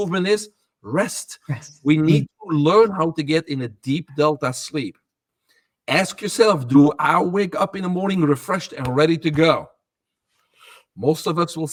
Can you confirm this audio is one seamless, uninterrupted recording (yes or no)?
yes